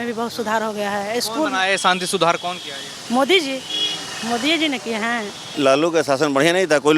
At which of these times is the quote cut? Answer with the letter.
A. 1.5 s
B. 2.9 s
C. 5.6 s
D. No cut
C